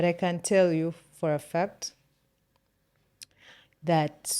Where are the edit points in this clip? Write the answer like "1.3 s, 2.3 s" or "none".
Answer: none